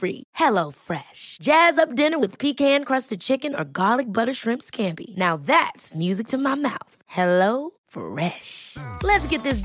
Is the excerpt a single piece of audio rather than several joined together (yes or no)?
yes